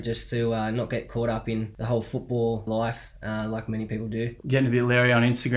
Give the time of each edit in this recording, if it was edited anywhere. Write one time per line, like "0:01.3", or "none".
0:01.7
0:02.7
0:04.4